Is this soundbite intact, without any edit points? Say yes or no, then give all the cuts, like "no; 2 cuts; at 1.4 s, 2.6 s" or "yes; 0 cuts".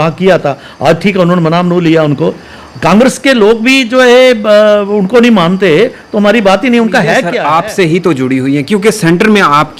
no; 1 cut; at 7.3 s